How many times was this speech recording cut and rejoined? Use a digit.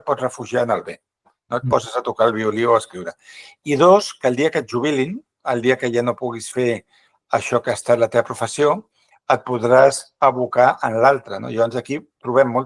0